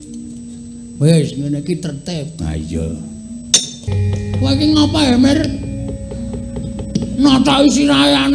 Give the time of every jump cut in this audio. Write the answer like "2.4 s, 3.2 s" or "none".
3.9 s